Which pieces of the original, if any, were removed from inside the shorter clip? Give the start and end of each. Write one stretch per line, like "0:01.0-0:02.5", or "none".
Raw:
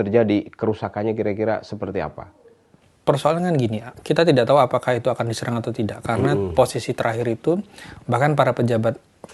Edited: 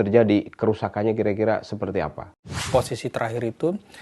0:02.6-0:06.5